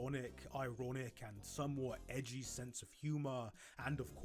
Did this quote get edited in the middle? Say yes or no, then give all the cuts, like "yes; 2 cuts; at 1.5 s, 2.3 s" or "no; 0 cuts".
yes; 1 cut; at 3.3 s